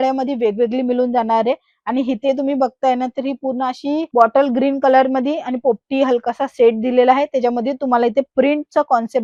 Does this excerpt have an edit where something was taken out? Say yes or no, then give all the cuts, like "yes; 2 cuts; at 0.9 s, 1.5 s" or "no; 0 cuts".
no; 0 cuts